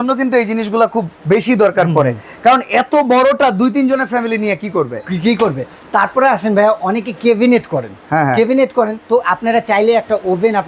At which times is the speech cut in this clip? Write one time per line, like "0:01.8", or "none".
none